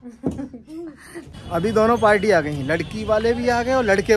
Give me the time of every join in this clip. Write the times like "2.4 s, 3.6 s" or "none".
1.3 s